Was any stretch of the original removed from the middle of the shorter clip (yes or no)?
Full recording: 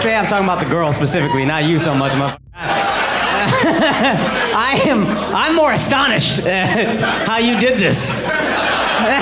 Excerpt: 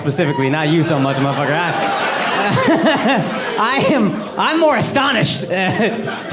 no